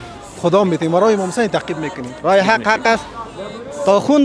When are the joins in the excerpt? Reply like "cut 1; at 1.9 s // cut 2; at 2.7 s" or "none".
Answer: cut 1; at 2.2 s